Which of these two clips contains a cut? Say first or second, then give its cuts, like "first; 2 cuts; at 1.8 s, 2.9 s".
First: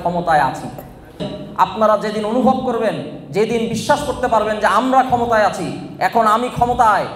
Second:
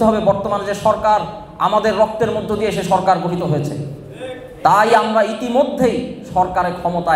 first; 1 cut; at 1.3 s